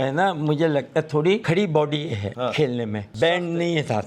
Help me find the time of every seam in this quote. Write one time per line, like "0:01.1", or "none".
0:01.4
0:02.3
0:03.1